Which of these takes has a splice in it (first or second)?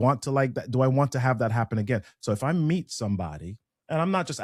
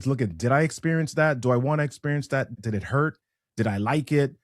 second